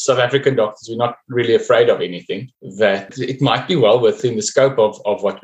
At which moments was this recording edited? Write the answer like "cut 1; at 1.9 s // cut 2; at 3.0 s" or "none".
cut 1; at 2.8 s // cut 2; at 4.2 s